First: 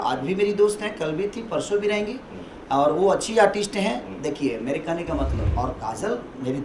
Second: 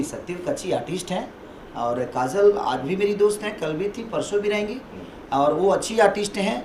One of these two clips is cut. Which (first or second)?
first